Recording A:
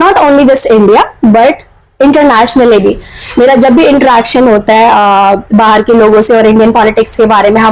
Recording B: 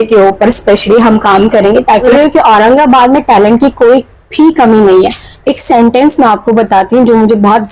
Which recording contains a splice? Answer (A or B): B